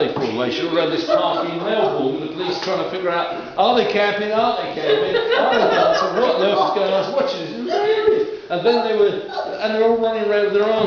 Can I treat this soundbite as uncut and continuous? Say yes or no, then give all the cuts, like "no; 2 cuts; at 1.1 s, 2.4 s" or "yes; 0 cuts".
yes; 0 cuts